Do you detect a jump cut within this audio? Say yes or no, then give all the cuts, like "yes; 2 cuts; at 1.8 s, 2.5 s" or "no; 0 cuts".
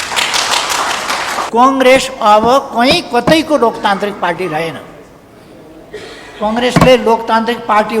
yes; 1 cut; at 1.4 s